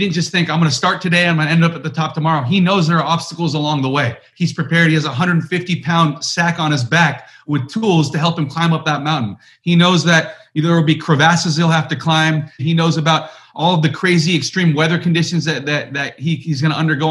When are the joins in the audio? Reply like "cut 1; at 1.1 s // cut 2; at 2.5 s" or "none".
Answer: cut 1; at 4.3 s // cut 2; at 12.6 s